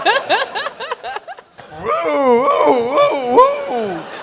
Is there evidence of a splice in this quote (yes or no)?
yes